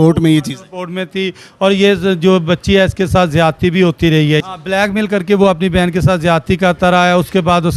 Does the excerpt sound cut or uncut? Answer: cut